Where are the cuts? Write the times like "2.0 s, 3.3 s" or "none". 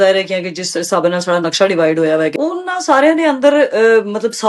2.3 s